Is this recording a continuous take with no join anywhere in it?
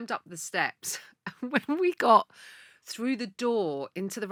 yes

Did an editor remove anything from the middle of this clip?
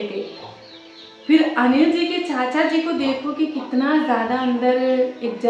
no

